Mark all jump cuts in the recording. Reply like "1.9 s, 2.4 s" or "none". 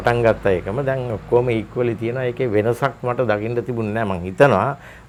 none